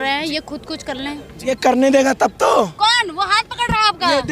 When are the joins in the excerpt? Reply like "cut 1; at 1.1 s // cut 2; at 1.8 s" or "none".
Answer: cut 1; at 1.5 s